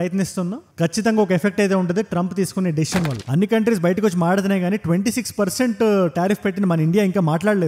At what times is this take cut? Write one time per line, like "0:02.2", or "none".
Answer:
0:03.2